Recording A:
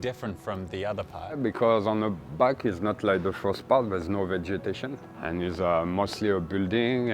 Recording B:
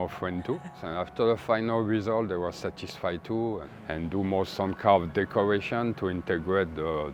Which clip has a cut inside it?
A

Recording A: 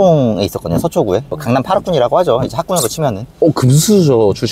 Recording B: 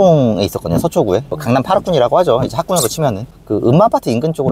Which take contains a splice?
B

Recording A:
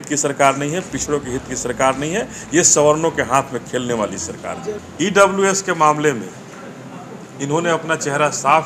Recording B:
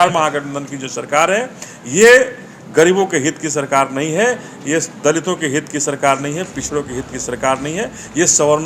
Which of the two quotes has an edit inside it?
A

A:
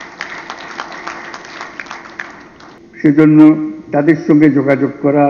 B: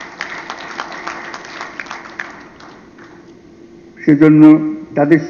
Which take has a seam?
A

